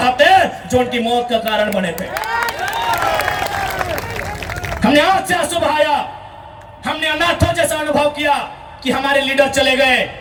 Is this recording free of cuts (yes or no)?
yes